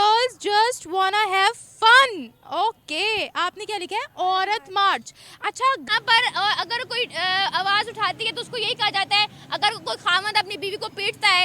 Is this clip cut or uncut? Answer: cut